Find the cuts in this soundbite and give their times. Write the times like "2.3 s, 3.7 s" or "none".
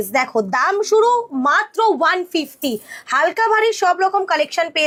none